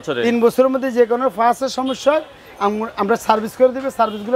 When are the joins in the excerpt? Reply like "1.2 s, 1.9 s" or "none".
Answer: none

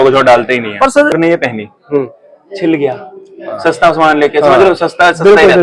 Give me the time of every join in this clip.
1.1 s

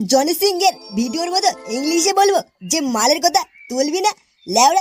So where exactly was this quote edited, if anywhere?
none

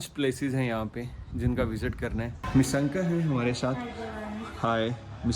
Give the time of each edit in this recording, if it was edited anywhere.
2.3 s

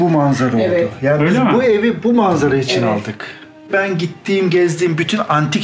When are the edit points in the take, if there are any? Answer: 3.7 s

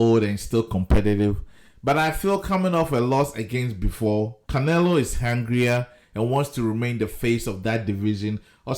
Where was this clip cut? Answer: 4.4 s

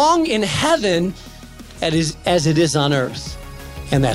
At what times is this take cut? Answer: none

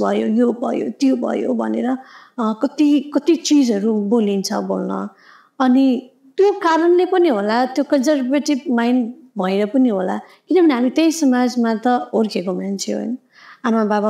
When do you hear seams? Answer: none

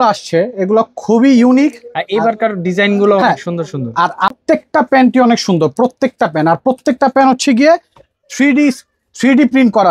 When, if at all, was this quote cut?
4.3 s

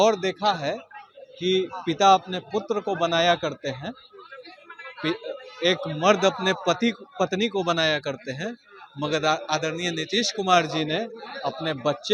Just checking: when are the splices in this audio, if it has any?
none

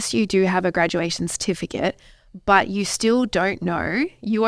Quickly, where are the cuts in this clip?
none

